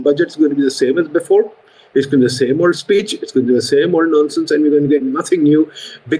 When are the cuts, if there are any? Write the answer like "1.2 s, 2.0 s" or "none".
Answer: none